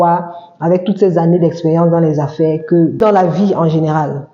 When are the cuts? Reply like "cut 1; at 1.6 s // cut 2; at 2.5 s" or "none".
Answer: cut 1; at 3.0 s

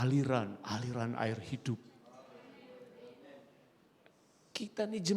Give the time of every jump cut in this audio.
none

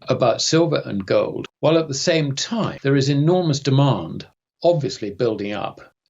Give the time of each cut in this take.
cut 1; at 1.4 s // cut 2; at 2.7 s

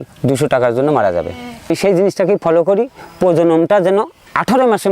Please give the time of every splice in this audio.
cut 1; at 1.7 s

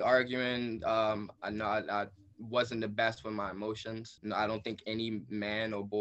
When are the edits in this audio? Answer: cut 1; at 1.3 s // cut 2; at 4.1 s

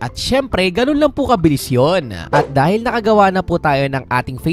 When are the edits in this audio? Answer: cut 1; at 2.2 s

